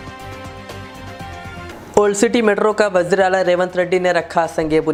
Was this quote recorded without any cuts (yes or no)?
yes